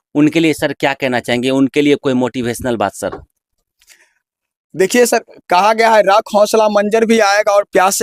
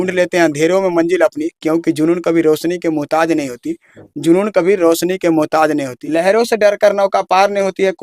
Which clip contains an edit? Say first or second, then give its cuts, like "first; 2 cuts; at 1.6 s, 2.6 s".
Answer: second; 1 cut; at 6.0 s